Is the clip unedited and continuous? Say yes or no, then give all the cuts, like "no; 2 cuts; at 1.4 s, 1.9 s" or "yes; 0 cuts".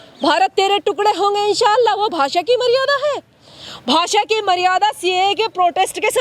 yes; 0 cuts